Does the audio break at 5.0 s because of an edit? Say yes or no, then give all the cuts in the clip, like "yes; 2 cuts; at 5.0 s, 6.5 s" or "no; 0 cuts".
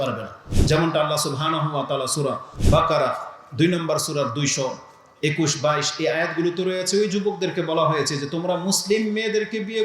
no; 1 cut; at 2.5 s